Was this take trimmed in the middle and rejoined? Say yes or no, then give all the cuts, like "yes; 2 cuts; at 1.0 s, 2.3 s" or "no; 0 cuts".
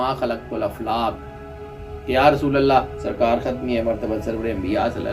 no; 0 cuts